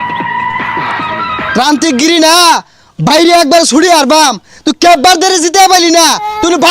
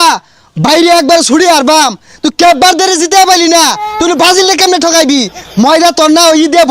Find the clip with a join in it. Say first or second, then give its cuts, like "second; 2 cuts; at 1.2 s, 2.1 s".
first; 1 cut; at 1.5 s